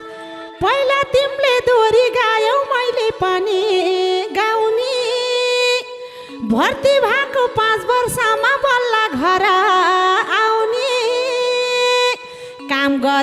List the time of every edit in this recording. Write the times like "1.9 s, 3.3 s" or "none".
none

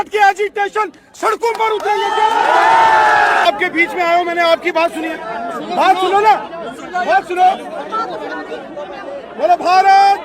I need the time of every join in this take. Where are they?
3.4 s

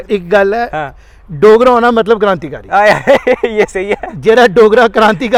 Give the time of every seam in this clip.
none

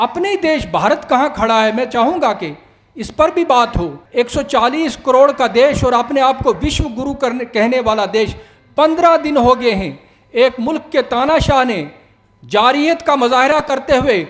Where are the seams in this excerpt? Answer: 4.0 s

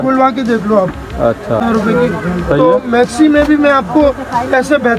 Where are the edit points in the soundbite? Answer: 1.6 s

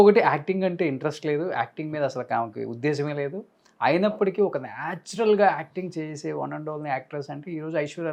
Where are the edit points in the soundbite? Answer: none

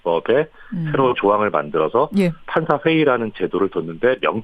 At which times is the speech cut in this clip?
1.4 s

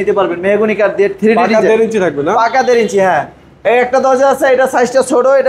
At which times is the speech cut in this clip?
none

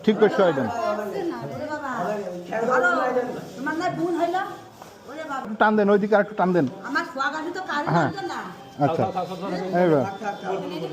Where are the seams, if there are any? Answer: 5.4 s

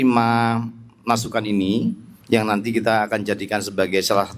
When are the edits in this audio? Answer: 2.1 s

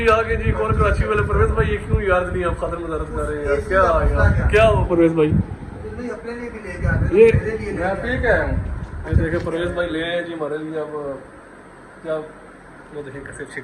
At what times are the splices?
none

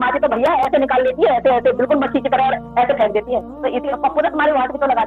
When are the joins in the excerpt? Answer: 3.8 s

